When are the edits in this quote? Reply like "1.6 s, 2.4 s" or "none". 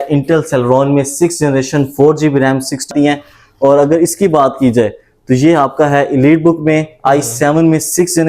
2.9 s